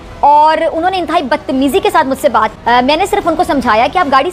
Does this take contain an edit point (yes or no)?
yes